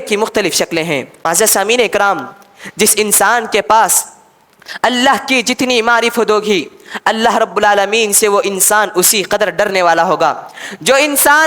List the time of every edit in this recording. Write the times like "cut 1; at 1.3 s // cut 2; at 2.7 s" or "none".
cut 1; at 1.1 s